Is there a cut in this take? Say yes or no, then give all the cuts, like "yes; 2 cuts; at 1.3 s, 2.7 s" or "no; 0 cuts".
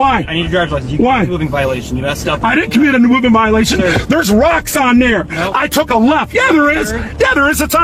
no; 0 cuts